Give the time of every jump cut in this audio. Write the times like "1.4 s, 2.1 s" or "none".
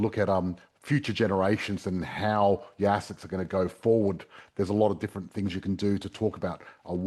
none

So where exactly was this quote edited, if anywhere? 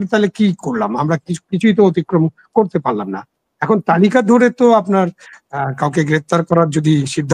none

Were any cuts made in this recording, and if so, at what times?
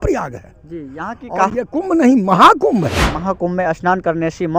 3.2 s

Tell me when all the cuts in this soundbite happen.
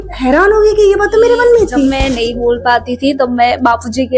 1.9 s

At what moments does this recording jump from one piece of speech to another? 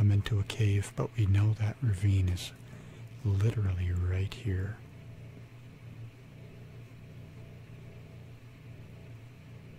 none

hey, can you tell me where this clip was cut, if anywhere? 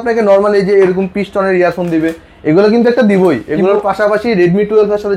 none

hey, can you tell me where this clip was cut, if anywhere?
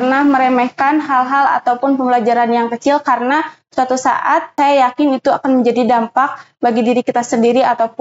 4.5 s

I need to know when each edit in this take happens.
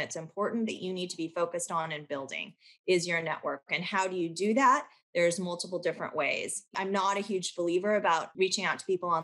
6.7 s, 8.3 s

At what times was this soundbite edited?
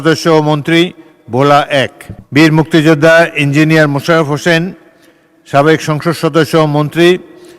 2.1 s

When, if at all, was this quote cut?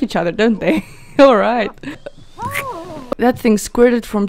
3.0 s

